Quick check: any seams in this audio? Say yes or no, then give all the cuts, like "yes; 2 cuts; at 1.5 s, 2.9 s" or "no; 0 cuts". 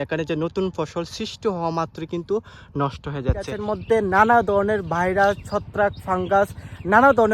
yes; 1 cut; at 3.6 s